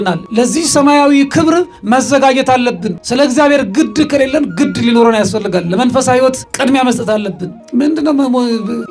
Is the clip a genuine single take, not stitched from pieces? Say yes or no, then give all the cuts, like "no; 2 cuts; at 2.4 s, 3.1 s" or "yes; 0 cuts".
no; 1 cut; at 7.5 s